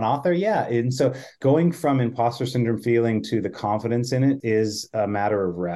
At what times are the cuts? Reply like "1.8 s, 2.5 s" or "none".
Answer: 1.6 s, 4.4 s